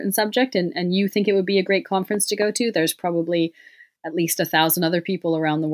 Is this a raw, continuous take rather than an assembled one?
yes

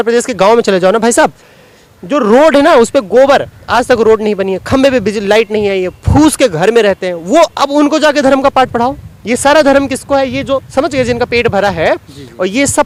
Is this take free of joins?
yes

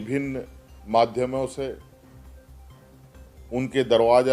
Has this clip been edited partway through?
yes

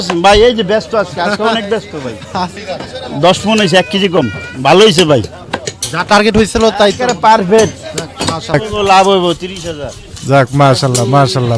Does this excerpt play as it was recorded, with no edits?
no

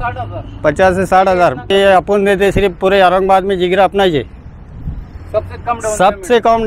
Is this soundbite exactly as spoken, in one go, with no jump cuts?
no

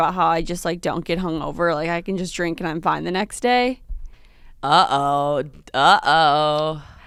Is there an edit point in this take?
no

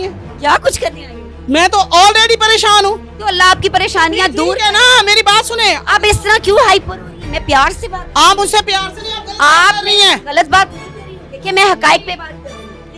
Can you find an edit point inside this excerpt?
no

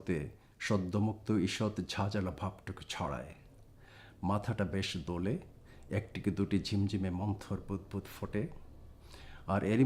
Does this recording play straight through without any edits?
no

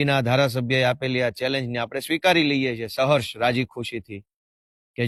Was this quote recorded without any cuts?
yes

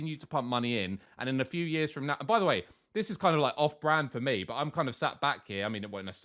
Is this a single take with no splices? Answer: yes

